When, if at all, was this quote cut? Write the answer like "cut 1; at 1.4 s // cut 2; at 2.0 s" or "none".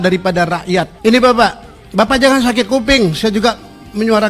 cut 1; at 0.9 s